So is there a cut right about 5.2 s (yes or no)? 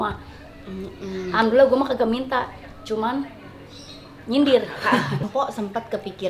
yes